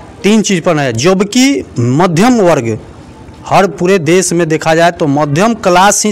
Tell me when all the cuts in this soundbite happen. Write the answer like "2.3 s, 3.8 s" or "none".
none